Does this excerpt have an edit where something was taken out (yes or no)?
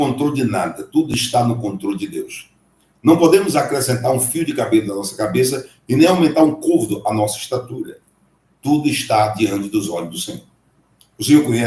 no